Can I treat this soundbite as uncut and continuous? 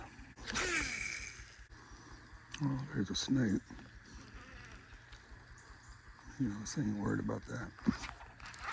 yes; 0 cuts

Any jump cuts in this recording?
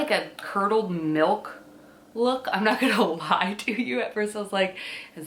no; 0 cuts

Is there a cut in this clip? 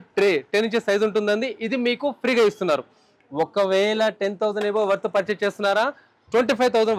no; 0 cuts

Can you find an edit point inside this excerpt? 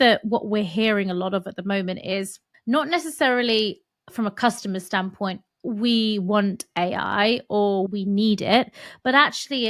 yes; 2 cuts; at 2.5 s, 7.9 s

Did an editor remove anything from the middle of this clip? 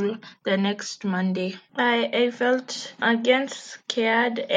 no; 0 cuts

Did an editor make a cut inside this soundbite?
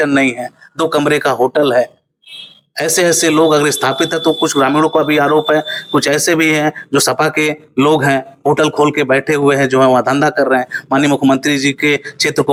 no; 0 cuts

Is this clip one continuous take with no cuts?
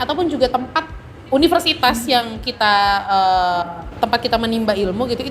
yes; 0 cuts

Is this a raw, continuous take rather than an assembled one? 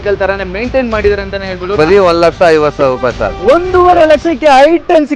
no; 1 cut; at 1.7 s

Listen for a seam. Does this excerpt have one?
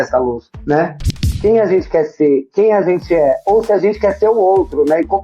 yes; 1 cut; at 1.2 s

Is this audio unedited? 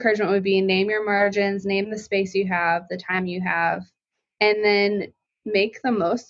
yes; 0 cuts

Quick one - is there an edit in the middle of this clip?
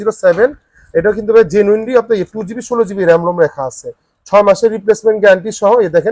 no; 0 cuts

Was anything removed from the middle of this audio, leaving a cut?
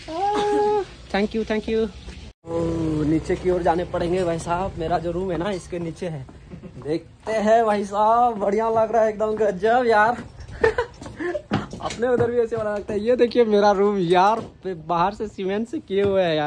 no; 0 cuts

